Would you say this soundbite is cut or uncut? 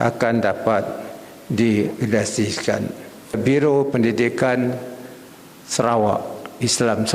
cut